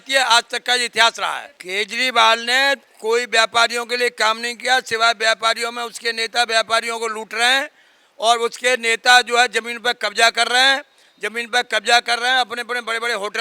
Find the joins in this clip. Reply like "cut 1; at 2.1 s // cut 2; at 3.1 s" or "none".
cut 1; at 1.5 s